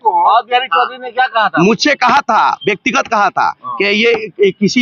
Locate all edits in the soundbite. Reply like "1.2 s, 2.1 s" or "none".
none